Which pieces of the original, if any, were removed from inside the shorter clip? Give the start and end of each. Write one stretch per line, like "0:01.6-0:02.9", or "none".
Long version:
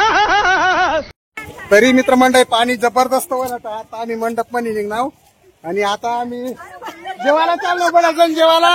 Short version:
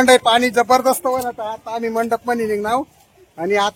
none